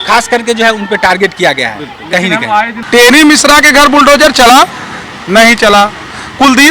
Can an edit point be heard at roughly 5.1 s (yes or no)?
no